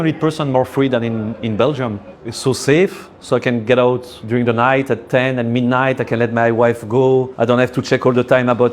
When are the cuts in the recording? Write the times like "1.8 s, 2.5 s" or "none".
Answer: 2.0 s, 4.1 s, 7.3 s

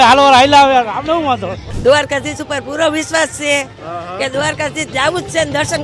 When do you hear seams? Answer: 1.7 s

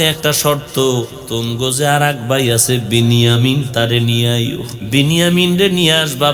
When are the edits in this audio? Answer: 1.2 s, 4.7 s

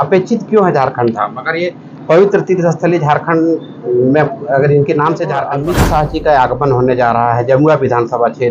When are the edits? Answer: 5.5 s

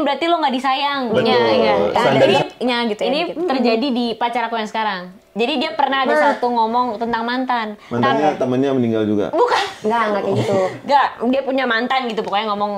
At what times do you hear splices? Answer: 2.3 s

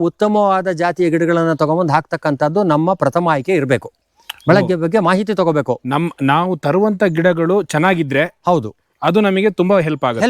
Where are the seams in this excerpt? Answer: none

